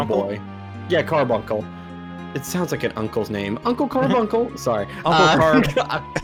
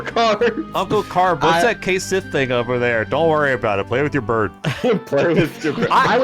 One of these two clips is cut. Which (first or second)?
second